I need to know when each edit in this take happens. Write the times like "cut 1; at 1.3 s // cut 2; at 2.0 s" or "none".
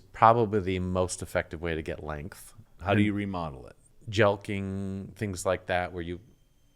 cut 1; at 2.6 s // cut 2; at 3.9 s